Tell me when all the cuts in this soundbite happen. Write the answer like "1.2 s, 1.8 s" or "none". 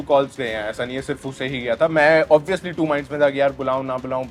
none